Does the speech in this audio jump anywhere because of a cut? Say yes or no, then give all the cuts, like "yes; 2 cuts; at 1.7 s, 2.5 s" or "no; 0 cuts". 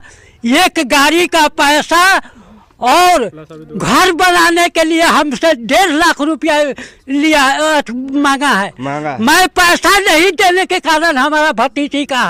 no; 0 cuts